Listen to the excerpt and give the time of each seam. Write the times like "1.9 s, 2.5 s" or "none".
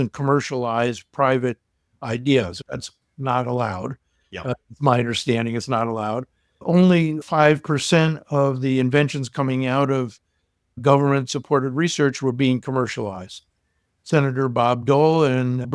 none